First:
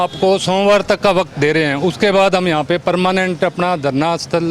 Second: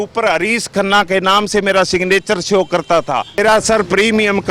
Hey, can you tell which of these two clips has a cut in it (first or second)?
second